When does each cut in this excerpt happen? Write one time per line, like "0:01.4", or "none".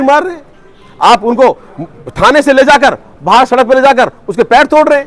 none